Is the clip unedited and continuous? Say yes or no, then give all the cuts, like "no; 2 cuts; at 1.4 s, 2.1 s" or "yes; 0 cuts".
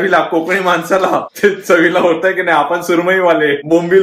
yes; 0 cuts